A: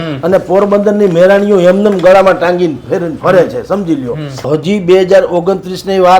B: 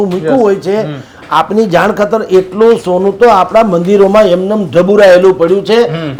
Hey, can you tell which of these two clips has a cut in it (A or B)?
A